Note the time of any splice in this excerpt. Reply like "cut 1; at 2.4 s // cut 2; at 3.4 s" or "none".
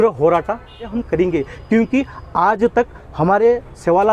cut 1; at 0.9 s